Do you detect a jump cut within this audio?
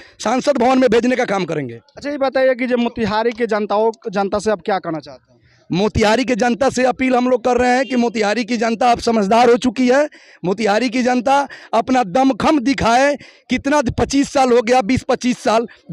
no; 0 cuts

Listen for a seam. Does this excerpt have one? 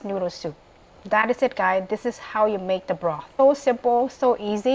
yes; 1 cut; at 3.4 s

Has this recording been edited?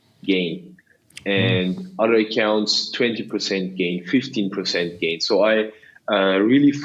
no; 0 cuts

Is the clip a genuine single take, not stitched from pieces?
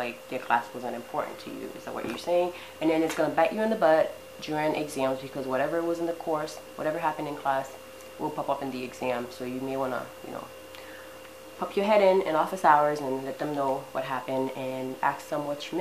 yes; 0 cuts

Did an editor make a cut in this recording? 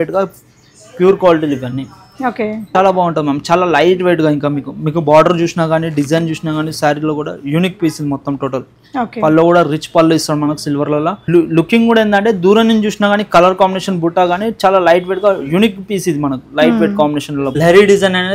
yes; 3 cuts; at 2.7 s, 11.3 s, 17.4 s

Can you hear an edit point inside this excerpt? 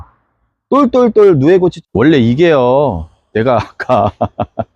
yes; 1 cut; at 1.8 s

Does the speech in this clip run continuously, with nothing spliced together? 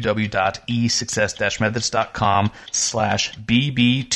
no; 1 cut; at 3.1 s

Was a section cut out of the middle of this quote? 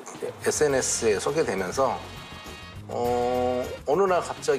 no; 0 cuts

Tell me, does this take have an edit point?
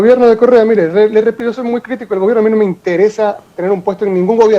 yes; 1 cut; at 1.4 s

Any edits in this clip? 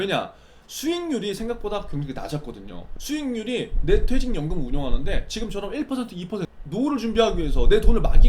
yes; 1 cut; at 6.6 s

